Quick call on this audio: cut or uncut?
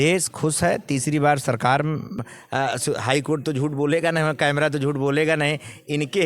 cut